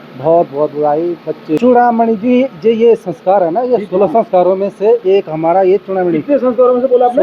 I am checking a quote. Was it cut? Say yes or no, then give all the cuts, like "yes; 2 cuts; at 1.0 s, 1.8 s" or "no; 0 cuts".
yes; 1 cut; at 1.6 s